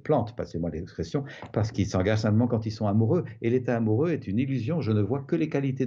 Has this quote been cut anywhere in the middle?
no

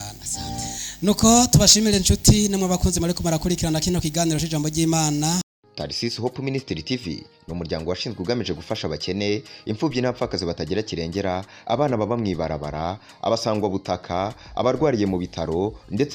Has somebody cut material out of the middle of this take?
yes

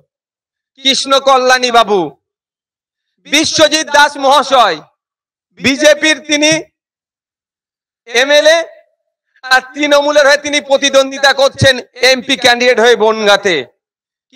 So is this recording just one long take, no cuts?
yes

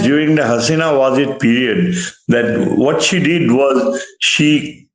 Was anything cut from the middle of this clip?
no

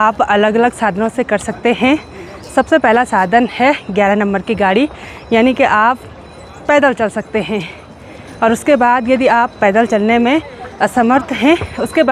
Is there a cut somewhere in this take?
no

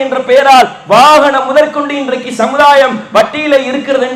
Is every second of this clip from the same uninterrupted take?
yes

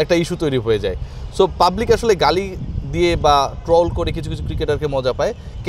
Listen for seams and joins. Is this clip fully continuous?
yes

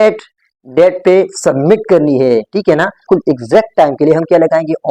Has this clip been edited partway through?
yes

